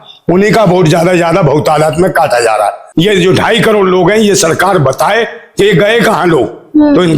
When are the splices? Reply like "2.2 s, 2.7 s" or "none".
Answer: 2.8 s